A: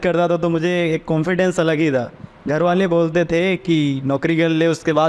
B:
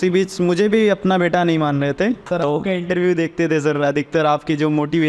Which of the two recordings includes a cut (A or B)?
B